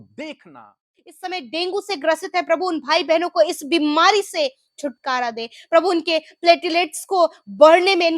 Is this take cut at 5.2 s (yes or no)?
no